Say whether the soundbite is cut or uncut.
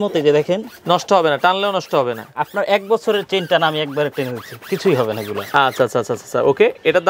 uncut